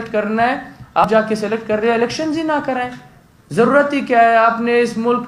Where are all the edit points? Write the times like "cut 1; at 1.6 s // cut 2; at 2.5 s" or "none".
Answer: cut 1; at 1.0 s